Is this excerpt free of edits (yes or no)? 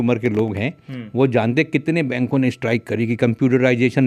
yes